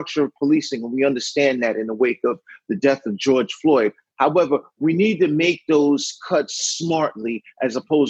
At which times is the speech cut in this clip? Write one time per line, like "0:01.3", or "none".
none